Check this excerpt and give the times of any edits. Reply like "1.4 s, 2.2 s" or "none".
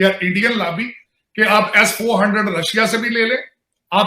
1.1 s